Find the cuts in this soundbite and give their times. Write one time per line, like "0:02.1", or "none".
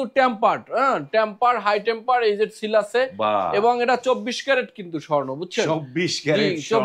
none